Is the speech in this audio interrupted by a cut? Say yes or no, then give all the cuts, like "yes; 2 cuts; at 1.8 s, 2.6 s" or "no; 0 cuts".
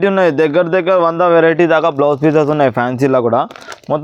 no; 0 cuts